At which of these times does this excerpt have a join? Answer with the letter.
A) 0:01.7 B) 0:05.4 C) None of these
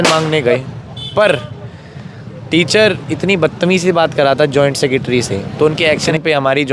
B